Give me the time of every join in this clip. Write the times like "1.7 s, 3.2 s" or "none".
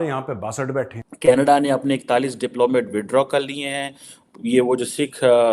1.0 s